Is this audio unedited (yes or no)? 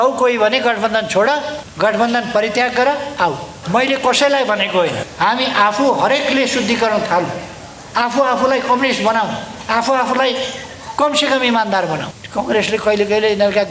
no